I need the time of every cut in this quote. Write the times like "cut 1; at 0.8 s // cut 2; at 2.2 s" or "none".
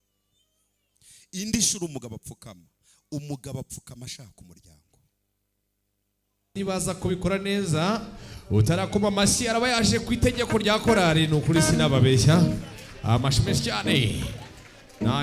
cut 1; at 6.5 s